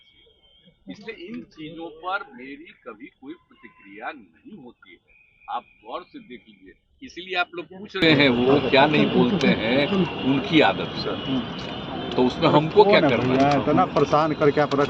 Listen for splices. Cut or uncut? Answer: cut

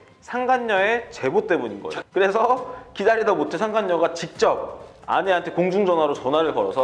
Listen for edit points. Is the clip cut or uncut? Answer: cut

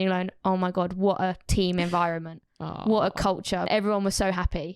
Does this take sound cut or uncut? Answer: cut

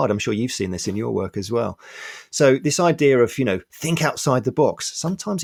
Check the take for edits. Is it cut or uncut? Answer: uncut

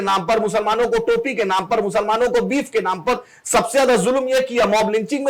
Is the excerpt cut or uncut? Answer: uncut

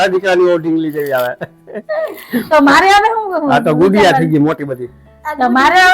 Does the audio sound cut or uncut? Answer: uncut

